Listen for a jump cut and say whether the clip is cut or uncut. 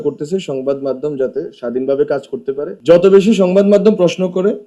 cut